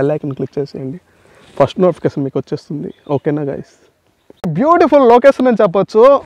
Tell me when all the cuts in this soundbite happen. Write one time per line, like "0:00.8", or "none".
0:04.5